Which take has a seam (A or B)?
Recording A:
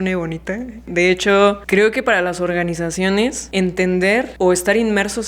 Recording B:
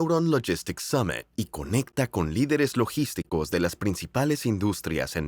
A